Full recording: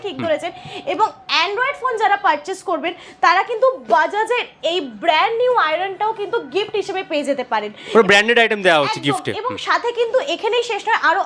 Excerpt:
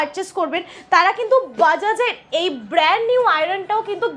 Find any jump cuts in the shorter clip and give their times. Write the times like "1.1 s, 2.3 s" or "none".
none